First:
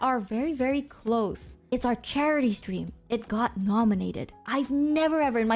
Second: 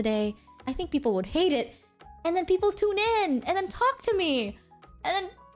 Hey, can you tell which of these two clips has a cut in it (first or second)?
first